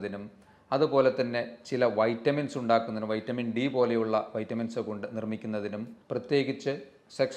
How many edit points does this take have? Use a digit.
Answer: 1